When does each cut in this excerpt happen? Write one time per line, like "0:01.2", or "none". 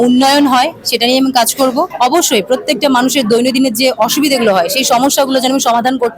0:01.9